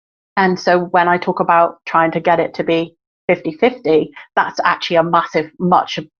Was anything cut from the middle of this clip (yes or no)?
no